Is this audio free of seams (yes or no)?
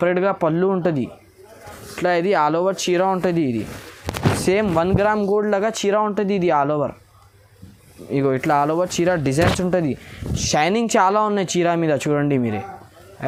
yes